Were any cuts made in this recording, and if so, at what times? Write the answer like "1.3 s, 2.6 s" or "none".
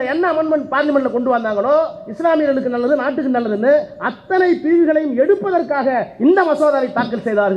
none